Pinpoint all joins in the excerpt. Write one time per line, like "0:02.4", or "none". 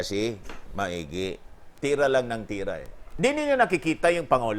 0:03.1